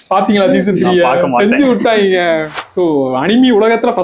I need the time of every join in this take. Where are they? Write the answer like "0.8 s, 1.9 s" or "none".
2.7 s